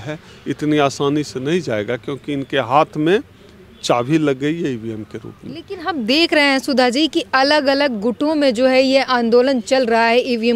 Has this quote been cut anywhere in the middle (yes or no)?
no